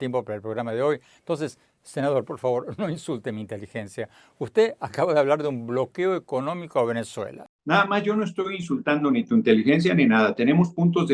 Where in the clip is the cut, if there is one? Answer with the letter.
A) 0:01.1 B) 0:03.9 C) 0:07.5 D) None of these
C